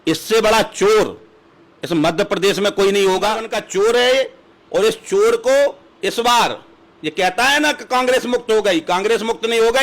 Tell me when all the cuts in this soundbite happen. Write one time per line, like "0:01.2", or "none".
0:03.5